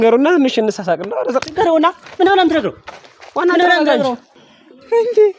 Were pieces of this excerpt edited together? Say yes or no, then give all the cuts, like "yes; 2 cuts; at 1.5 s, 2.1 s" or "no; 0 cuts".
yes; 1 cut; at 4.3 s